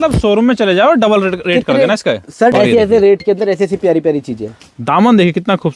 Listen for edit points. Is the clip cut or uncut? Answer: cut